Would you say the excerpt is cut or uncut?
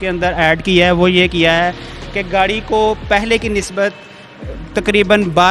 uncut